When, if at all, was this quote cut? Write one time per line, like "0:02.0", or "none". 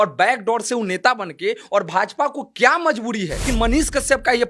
0:03.5